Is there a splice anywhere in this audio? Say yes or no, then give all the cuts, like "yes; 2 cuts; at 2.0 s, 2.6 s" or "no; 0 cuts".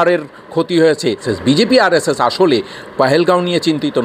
yes; 1 cut; at 1.2 s